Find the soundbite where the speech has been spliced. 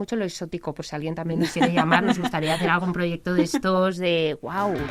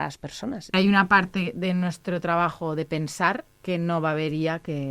second; 2 cuts; at 0.7 s, 3.5 s

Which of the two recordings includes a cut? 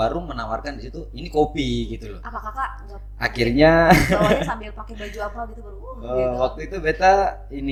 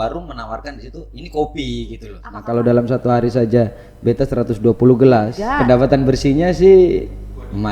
second; 2 cuts; at 2.3 s, 5.4 s

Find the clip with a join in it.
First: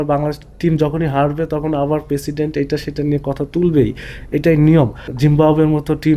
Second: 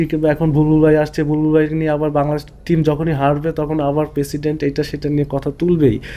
first; 1 cut; at 5.0 s

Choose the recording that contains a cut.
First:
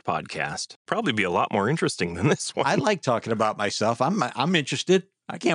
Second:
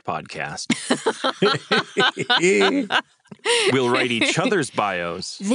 first; 2 cuts; at 0.8 s, 2.8 s

